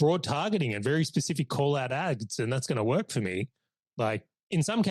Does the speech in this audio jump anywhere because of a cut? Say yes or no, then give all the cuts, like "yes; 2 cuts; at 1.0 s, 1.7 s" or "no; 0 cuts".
no; 0 cuts